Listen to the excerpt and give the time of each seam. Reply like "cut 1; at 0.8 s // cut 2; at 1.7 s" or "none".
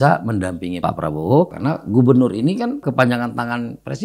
cut 1; at 0.8 s // cut 2; at 1.5 s // cut 3; at 2.8 s